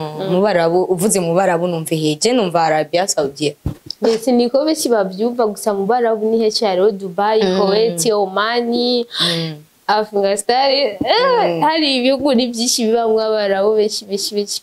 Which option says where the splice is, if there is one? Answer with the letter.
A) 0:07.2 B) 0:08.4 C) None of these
C